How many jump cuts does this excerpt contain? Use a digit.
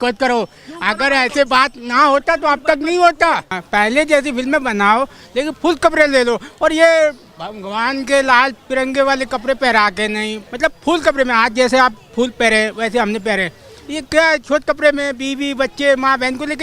2